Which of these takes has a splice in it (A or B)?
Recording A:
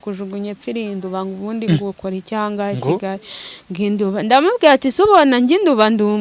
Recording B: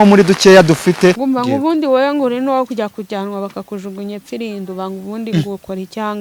B